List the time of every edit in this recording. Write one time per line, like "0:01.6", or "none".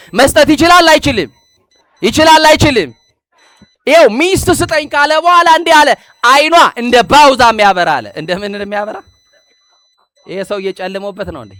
none

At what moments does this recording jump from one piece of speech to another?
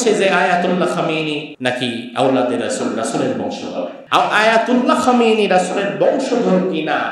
0:01.5
0:04.0

